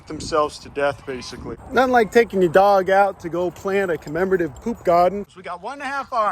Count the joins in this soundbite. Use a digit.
2